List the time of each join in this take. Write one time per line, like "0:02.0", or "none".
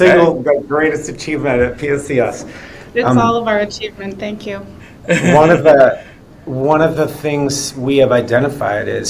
none